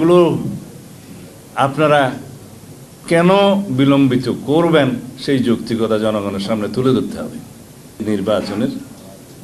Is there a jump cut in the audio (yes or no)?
yes